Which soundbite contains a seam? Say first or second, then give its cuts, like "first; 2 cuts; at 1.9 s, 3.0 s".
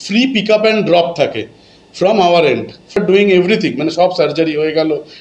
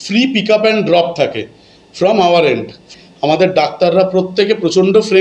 second; 1 cut; at 2.9 s